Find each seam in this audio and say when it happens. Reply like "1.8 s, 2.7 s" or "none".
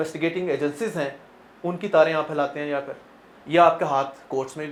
none